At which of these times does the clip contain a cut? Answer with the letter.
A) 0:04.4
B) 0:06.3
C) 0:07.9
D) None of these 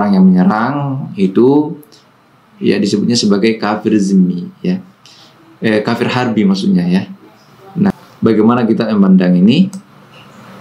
C